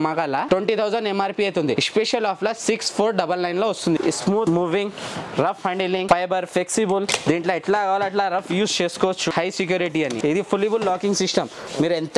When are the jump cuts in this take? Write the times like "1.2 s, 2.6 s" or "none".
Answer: 4.0 s, 9.3 s, 10.2 s